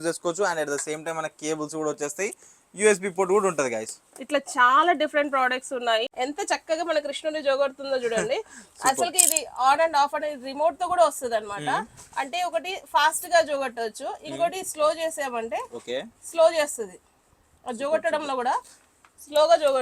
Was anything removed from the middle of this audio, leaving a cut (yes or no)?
yes